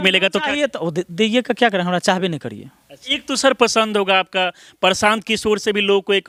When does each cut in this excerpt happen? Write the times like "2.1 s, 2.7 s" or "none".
none